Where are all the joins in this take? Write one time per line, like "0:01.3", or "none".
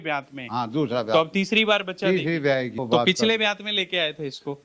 0:02.8